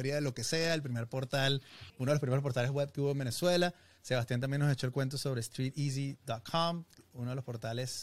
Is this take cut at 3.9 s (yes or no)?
no